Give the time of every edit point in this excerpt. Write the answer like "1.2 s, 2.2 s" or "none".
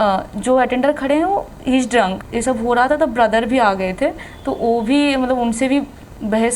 2.2 s

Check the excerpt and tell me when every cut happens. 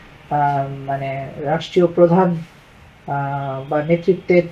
none

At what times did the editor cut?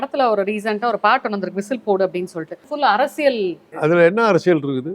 2.6 s, 3.7 s

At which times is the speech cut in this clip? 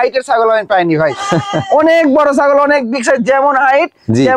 none

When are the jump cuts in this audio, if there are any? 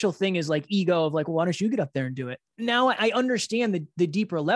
2.3 s

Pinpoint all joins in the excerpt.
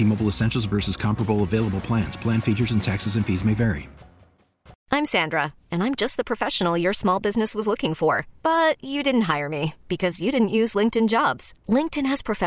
4.8 s

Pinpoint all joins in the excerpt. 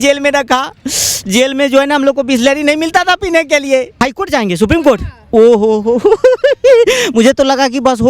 4.0 s

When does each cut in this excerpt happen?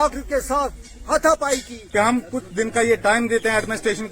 1.8 s

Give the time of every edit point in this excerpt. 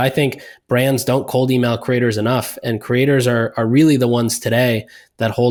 none

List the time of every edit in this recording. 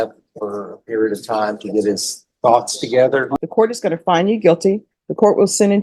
3.3 s

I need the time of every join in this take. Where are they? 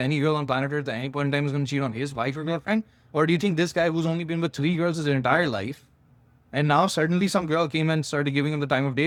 none

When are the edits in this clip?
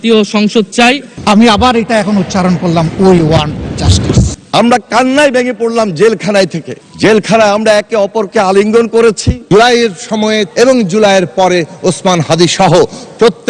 1.1 s, 4.4 s, 9.3 s, 10.5 s

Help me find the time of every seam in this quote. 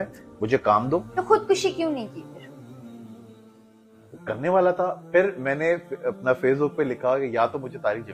none

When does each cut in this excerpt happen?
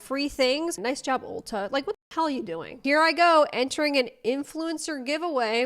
0.8 s, 2.8 s

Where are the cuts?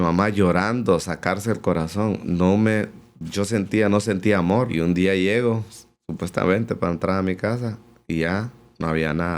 4.7 s

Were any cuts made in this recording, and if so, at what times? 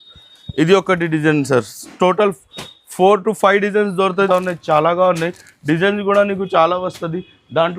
4.3 s

